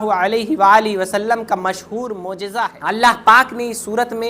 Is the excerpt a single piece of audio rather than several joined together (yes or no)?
no